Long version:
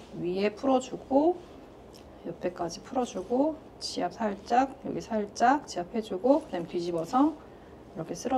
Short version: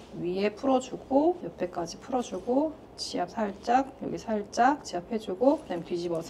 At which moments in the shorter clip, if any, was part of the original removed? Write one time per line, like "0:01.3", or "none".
0:01.5

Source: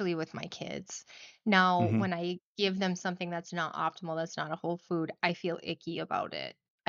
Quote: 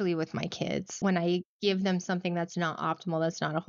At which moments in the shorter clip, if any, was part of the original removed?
0:01.0

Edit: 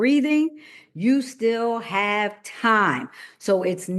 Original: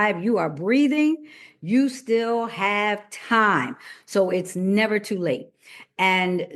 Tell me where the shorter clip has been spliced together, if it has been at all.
none

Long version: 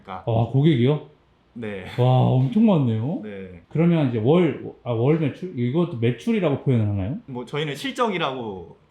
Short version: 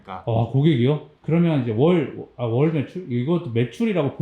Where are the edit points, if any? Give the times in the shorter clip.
0:01.1

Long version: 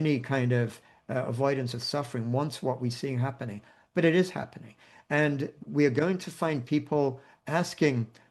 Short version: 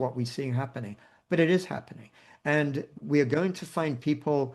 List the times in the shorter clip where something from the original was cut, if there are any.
none

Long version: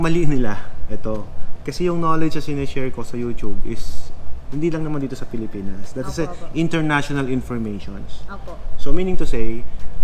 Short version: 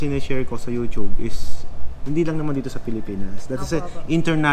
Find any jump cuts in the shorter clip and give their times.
none

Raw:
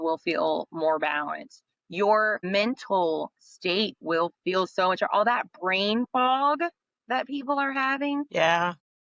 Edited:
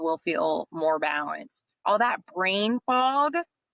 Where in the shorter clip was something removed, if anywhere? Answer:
0:01.8

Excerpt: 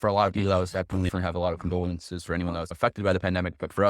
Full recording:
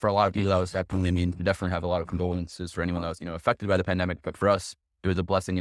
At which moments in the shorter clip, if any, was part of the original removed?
0:01.1
0:02.7

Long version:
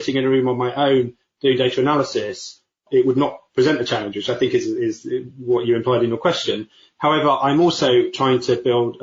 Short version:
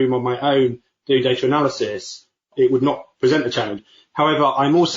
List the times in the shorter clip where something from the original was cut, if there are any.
0:03.8

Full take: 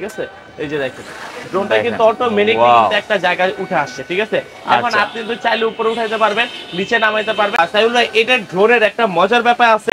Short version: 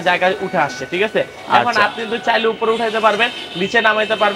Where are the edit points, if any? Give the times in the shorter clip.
none

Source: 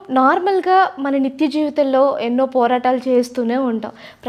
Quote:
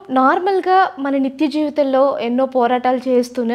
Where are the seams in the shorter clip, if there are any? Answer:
none

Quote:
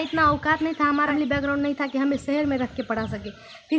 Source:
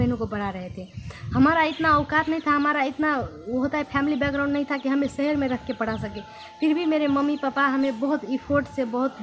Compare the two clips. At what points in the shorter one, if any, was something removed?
0:01.1

